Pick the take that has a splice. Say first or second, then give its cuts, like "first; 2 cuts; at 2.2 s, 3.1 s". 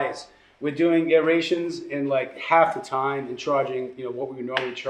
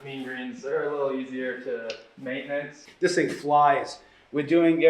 second; 1 cut; at 2.8 s